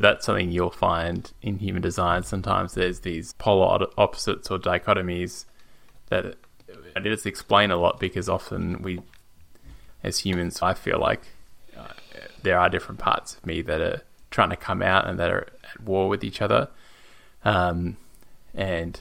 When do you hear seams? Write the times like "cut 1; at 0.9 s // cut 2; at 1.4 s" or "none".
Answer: cut 1; at 3.2 s // cut 2; at 7.0 s // cut 3; at 10.6 s // cut 4; at 12.3 s